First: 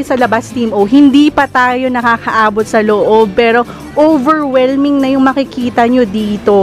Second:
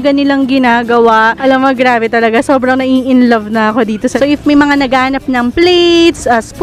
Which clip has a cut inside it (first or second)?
second